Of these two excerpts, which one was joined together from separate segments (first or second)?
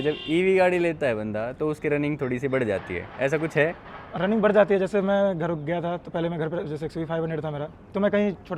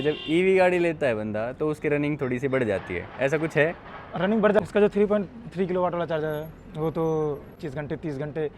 second